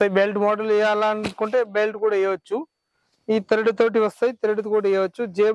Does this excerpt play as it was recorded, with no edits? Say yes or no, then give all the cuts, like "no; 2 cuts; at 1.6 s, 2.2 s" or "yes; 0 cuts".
yes; 0 cuts